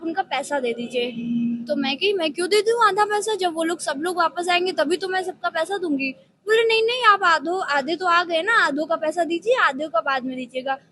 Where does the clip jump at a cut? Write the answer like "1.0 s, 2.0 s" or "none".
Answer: none